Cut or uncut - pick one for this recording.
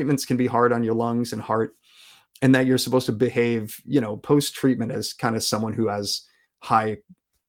uncut